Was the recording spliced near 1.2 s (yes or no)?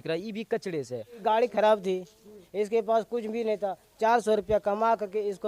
yes